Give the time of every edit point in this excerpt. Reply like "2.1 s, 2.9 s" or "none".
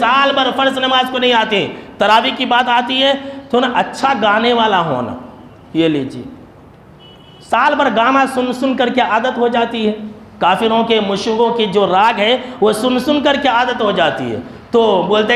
none